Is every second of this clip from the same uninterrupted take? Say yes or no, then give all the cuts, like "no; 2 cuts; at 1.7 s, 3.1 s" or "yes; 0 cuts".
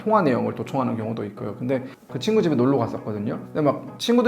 no; 1 cut; at 2.0 s